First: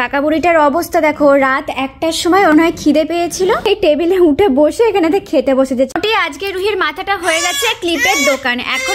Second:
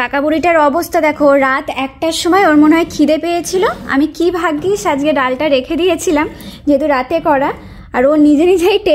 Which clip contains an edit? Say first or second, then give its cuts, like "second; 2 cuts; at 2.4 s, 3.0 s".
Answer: first; 3 cuts; at 2.5 s, 3.7 s, 5.9 s